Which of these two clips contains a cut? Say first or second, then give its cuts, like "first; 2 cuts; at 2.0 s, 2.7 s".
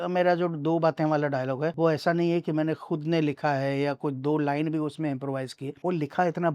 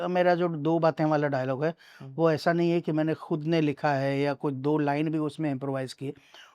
first; 2 cuts; at 1.7 s, 5.6 s